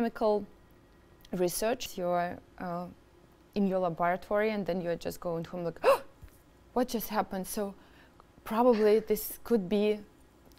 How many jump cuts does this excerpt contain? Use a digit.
1